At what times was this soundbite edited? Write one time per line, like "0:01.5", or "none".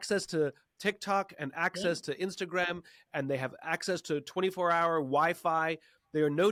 none